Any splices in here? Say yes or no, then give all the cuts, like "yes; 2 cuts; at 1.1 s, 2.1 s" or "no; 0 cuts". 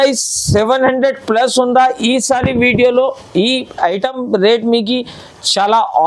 no; 0 cuts